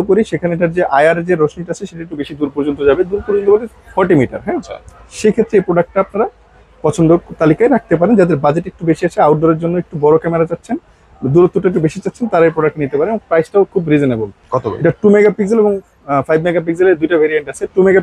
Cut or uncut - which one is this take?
uncut